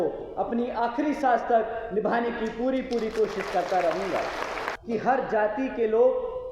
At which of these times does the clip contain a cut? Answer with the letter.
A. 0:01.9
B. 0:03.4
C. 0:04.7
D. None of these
C